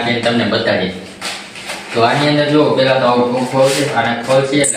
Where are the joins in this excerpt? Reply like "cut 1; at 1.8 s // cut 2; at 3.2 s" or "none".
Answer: none